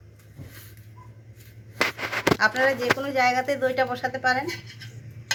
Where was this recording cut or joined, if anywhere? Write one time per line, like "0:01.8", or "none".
none